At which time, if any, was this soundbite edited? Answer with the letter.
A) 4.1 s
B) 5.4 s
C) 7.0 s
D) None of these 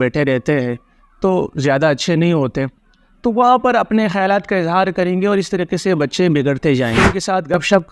C